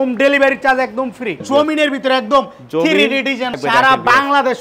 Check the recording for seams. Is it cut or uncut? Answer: cut